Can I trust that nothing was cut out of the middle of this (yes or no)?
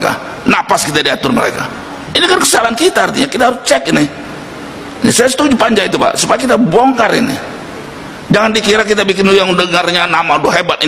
yes